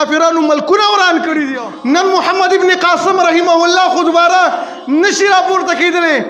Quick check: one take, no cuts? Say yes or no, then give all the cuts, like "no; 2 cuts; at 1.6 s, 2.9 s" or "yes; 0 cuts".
no; 1 cut; at 1.5 s